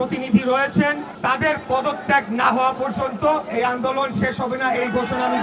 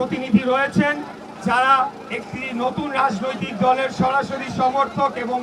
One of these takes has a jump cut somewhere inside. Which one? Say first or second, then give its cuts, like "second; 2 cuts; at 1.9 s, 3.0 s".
first; 1 cut; at 1.1 s